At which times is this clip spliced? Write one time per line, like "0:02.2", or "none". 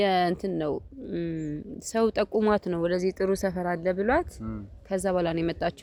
none